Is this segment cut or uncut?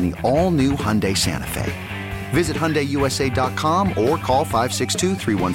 uncut